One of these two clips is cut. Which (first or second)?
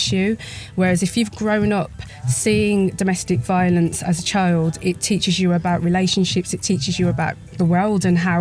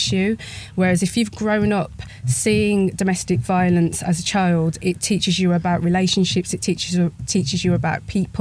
first